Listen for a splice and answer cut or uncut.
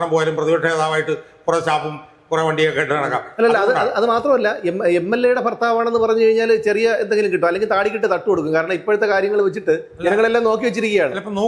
uncut